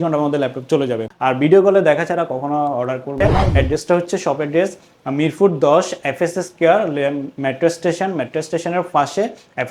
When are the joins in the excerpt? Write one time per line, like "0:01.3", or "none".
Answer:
0:01.1
0:03.4